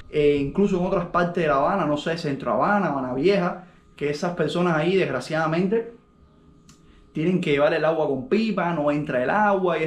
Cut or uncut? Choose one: uncut